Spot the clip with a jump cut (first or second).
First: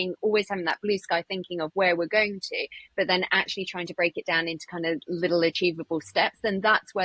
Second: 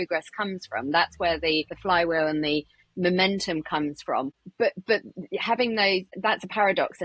second